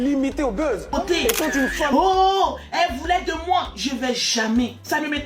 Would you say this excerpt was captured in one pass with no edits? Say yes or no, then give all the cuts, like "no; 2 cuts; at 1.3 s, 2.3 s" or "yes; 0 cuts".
no; 1 cut; at 1.9 s